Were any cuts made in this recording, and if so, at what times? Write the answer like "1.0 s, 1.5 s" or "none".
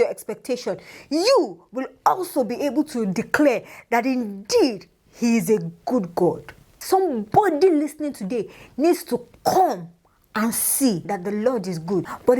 6.8 s, 11.1 s